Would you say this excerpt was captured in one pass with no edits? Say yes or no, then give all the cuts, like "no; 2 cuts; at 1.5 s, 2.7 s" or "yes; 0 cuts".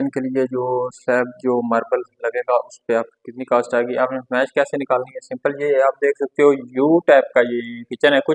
yes; 0 cuts